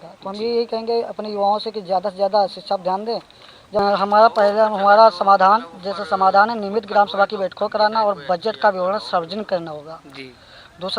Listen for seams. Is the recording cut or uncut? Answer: cut